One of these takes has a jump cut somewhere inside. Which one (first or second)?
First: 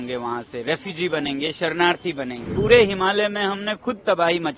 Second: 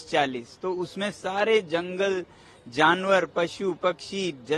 first